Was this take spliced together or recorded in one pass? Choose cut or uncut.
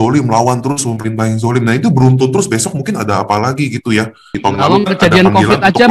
cut